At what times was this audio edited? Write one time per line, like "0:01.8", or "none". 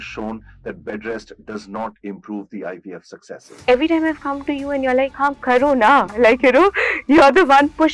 0:03.6
0:05.1